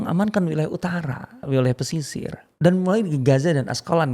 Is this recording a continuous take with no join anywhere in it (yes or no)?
no